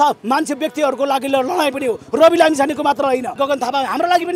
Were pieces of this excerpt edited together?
yes; 1 cut; at 3.3 s

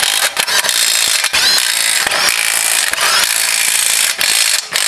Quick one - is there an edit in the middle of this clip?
no; 0 cuts

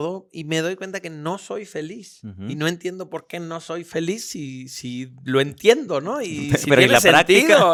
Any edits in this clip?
no; 0 cuts

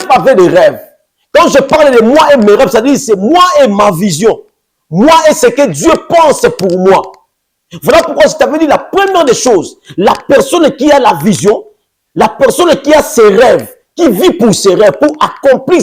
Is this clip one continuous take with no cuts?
yes; 0 cuts

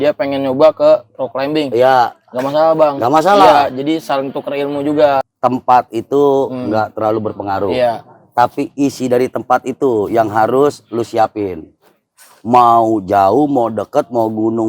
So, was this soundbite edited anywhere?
yes; 1 cut; at 5.2 s

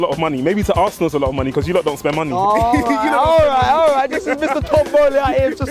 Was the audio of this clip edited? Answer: no; 0 cuts

